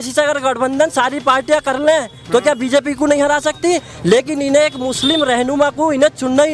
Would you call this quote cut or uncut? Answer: uncut